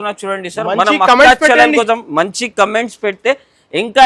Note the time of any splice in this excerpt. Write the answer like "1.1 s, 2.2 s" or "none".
none